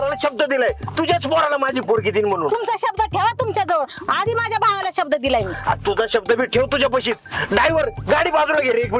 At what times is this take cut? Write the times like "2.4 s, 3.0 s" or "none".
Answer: none